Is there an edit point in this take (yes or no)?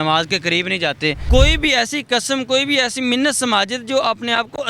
yes